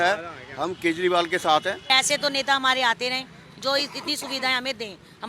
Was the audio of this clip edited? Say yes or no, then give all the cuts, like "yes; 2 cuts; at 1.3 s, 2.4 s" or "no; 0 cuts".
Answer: yes; 1 cut; at 1.9 s